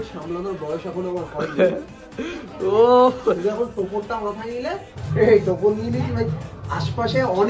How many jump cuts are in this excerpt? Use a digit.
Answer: 1